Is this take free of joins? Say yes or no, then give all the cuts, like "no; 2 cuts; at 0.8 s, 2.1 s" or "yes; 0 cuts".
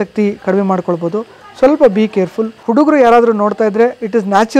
no; 1 cut; at 2.5 s